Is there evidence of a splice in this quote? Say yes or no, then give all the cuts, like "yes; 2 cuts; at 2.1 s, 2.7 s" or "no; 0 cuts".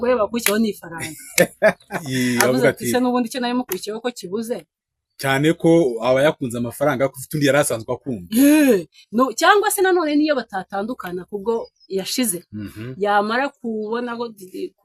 yes; 1 cut; at 1.9 s